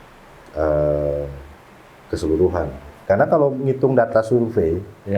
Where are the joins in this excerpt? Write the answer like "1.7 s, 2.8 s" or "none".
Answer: 2.9 s